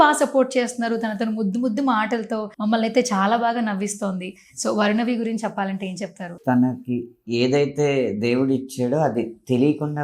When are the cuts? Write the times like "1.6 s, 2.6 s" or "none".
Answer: 2.5 s, 6.3 s